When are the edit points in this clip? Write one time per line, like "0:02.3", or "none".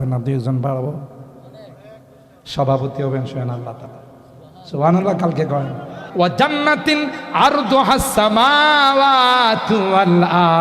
0:06.0